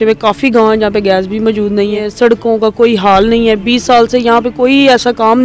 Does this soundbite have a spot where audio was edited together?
yes; 1 cut; at 2.1 s

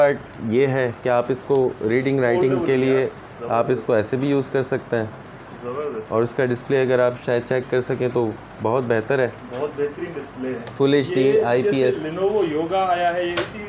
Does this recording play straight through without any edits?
yes; 0 cuts

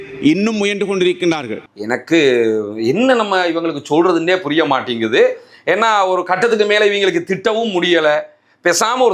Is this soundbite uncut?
yes; 0 cuts

